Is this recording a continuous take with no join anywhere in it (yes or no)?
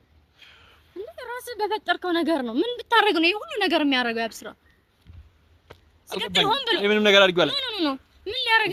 yes